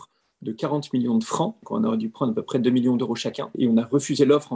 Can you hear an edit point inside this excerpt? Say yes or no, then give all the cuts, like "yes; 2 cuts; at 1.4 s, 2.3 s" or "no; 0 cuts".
yes; 2 cuts; at 1.6 s, 3.5 s